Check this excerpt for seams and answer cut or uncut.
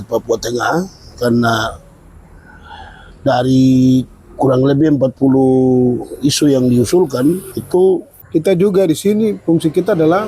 cut